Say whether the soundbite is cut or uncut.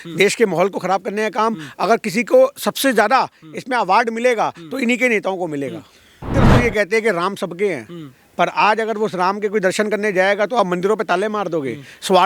cut